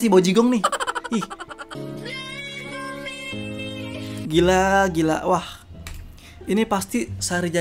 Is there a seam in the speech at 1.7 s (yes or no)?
yes